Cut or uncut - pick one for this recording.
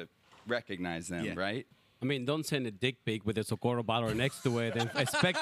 cut